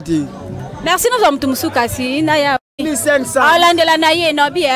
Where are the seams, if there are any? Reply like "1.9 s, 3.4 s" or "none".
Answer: 2.7 s